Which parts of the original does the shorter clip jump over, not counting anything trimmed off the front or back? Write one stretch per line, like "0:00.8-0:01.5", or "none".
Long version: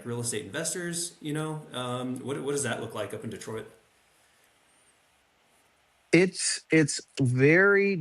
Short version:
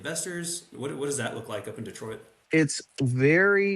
0:01.2-0:02.2
0:03.8-0:06.5

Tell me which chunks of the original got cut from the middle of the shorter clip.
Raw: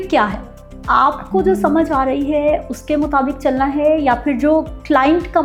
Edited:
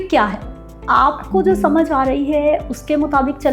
none

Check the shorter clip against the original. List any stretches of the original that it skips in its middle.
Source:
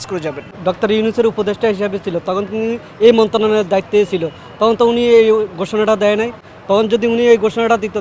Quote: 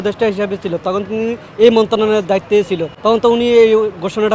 0:04.3-0:04.4

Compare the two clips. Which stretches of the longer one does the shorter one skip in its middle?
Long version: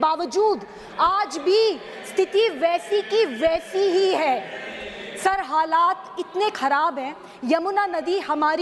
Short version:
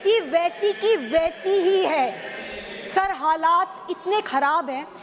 none

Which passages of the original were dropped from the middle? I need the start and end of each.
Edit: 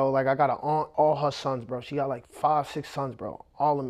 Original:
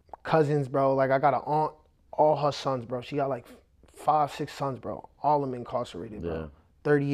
0:01.7-0:02.1
0:03.5-0:03.9

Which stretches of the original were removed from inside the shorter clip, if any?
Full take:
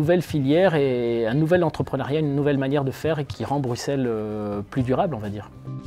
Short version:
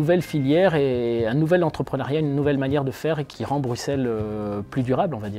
none

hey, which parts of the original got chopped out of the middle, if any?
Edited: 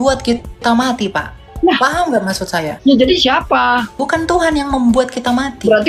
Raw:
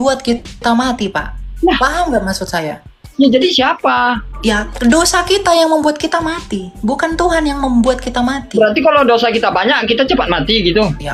0:02.7-0:03.1
0:04.3-0:06.9

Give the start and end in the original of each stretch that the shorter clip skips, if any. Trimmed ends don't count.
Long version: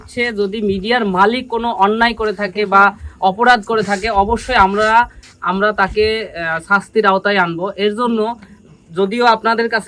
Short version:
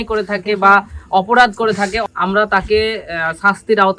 0:04.1-0:05.2

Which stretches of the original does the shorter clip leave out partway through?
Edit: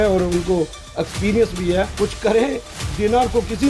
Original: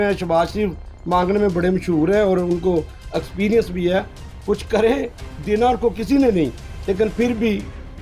0:04.1-0:04.4

